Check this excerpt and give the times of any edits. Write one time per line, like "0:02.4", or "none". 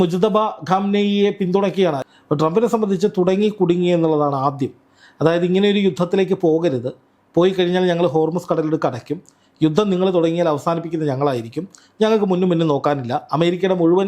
0:02.0